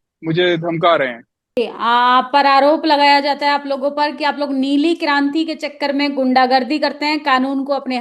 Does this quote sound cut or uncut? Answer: cut